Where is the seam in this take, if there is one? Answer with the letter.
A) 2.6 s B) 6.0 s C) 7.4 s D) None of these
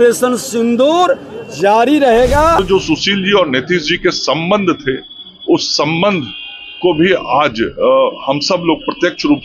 A